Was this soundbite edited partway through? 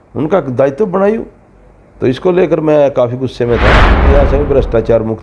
yes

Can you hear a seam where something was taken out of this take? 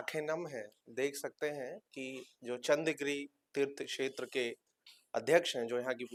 no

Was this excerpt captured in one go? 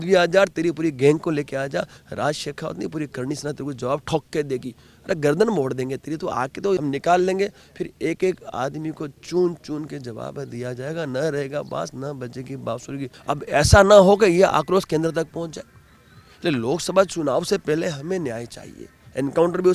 no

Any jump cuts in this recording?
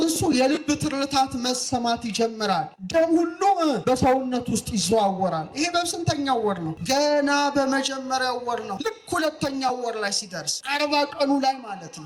yes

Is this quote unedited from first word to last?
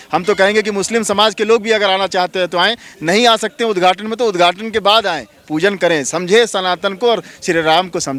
yes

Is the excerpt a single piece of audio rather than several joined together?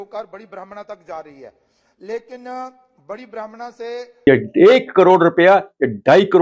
no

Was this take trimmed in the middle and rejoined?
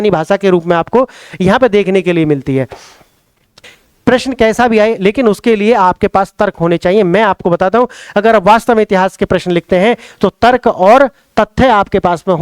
yes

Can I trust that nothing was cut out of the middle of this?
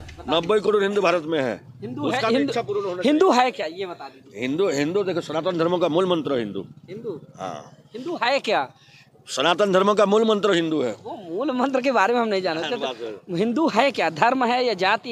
yes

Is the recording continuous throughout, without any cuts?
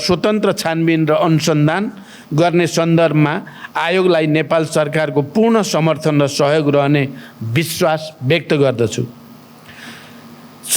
yes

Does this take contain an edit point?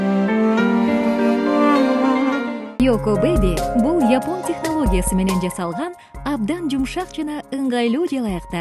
yes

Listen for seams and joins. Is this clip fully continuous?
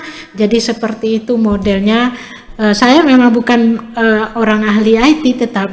yes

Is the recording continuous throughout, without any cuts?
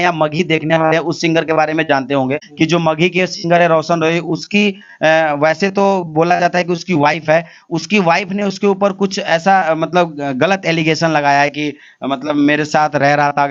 no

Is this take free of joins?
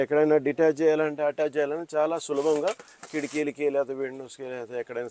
yes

